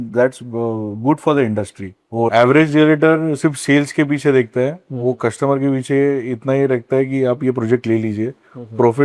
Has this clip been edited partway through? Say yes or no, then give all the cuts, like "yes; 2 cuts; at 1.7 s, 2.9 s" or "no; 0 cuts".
yes; 1 cut; at 2.3 s